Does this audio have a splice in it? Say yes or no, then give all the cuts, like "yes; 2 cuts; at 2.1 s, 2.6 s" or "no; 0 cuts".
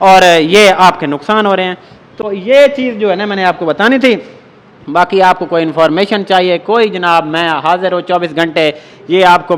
no; 0 cuts